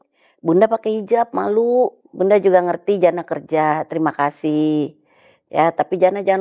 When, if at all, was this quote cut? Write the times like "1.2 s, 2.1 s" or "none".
2.0 s